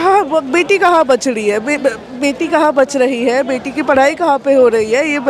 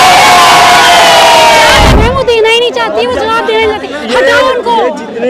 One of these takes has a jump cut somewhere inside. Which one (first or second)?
second